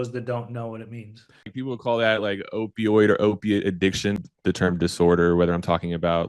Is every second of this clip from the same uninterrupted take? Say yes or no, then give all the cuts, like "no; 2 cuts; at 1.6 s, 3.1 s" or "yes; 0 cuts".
no; 2 cuts; at 1.5 s, 4.2 s